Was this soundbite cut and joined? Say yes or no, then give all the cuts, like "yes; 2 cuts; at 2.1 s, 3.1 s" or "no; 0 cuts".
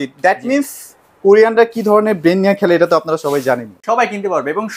yes; 1 cut; at 3.7 s